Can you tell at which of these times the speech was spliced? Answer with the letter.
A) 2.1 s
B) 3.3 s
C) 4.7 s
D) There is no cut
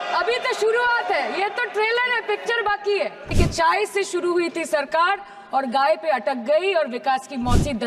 B